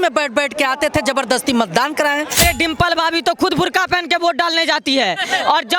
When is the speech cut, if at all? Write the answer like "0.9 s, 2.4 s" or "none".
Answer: 2.4 s

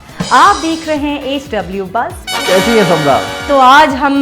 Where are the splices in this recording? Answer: 2.2 s, 3.4 s

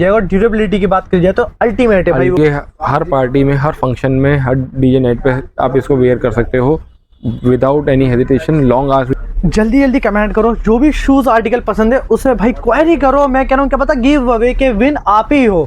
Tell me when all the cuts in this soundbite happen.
2.4 s, 9.1 s

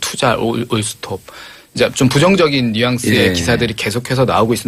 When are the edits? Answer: 1.9 s

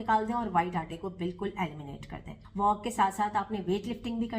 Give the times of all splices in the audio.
2.4 s

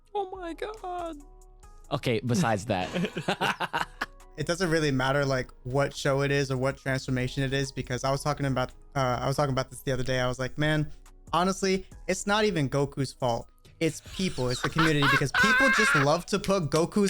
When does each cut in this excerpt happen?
4.4 s

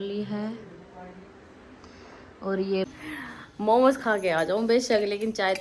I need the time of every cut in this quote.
2.9 s

